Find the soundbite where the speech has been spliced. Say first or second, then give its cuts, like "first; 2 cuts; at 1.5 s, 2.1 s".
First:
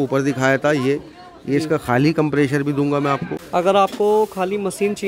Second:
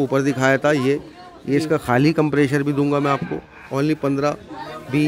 first; 1 cut; at 3.3 s